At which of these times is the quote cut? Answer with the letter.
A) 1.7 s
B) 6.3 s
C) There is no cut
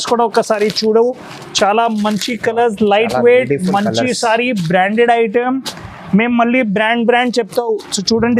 C